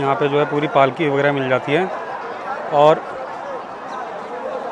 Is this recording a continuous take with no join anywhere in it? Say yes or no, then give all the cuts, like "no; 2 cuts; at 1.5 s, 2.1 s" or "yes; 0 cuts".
yes; 0 cuts